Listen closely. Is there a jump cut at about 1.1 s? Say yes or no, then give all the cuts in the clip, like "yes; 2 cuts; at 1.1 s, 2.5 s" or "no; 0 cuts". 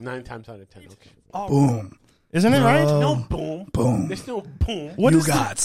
yes; 1 cut; at 1.1 s